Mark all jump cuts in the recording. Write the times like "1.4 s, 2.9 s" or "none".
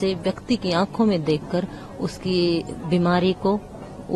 none